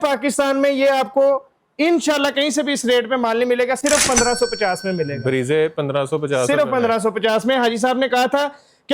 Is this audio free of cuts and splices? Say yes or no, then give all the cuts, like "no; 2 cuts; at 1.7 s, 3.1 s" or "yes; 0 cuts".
yes; 0 cuts